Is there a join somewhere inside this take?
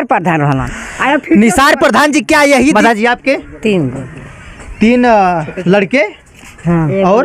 yes; 1 cut; at 2.8 s

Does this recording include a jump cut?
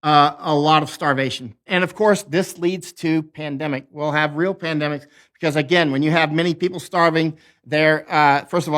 yes; 1 cut; at 1.7 s

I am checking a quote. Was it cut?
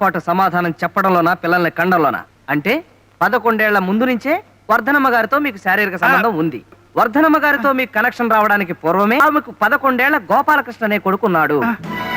yes; 3 cuts; at 2.3 s, 6.7 s, 9.2 s

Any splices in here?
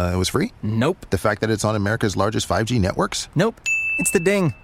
no; 0 cuts

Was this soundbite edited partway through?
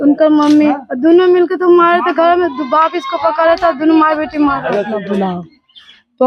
yes; 1 cut; at 5.0 s

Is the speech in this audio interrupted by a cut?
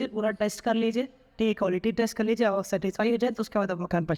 no; 0 cuts

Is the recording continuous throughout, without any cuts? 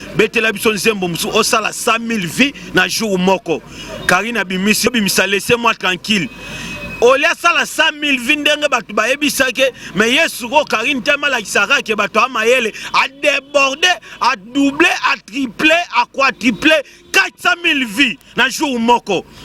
no; 1 cut; at 4.9 s

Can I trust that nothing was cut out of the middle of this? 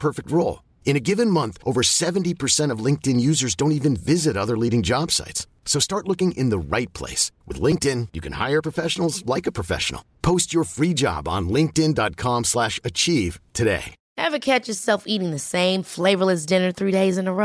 no; 1 cut; at 14.0 s

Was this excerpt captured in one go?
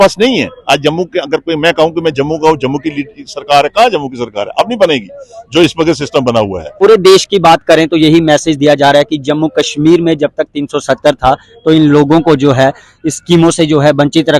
no; 1 cut; at 6.6 s

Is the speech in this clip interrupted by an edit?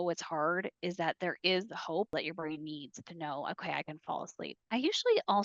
yes; 2 cuts; at 2.1 s, 4.6 s

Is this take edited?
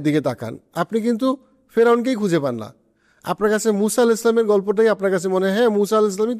no; 0 cuts

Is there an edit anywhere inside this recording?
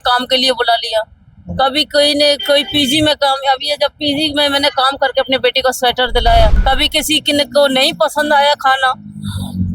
yes; 1 cut; at 6.6 s

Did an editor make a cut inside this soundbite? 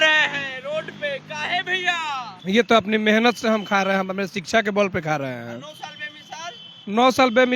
yes; 1 cut; at 2.3 s

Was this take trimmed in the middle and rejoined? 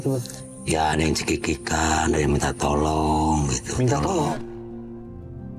yes; 1 cut; at 4.4 s

